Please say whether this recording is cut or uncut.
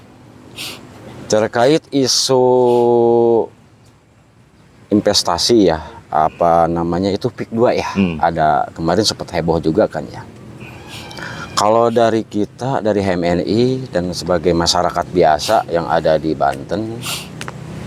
uncut